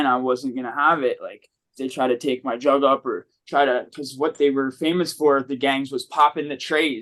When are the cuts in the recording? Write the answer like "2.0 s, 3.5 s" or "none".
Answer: none

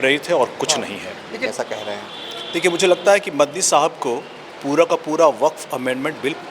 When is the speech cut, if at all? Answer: 1.4 s

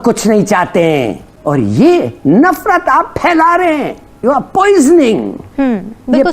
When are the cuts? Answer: 1.3 s, 4.1 s

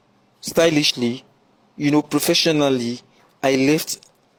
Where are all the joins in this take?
none

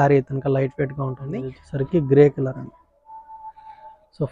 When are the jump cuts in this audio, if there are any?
1.6 s

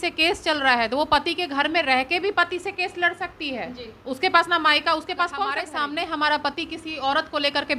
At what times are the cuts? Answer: 5.7 s

